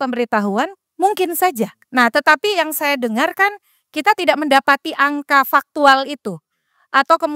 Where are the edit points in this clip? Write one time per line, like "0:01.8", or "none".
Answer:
0:01.8